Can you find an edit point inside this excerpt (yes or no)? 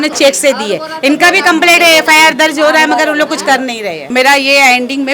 yes